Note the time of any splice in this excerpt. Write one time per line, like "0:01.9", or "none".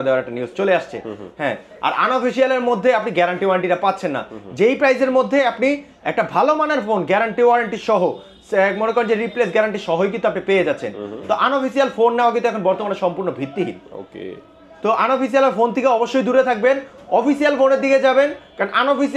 none